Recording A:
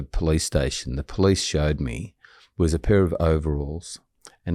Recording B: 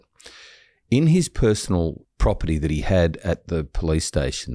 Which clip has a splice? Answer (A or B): B